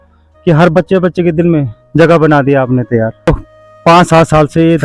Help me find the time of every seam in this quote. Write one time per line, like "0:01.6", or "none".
0:03.3